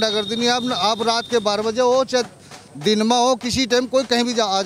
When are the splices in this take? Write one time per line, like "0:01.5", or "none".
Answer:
none